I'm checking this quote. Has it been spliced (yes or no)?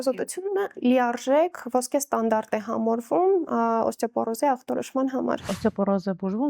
yes